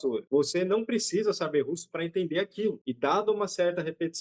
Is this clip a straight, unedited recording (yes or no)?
yes